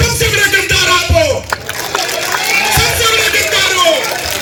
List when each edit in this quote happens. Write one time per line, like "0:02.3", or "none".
none